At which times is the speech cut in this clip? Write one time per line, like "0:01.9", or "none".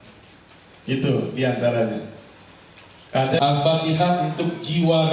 0:03.4